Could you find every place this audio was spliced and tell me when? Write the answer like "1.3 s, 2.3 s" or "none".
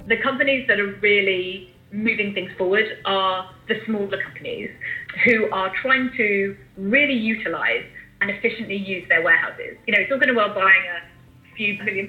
9.6 s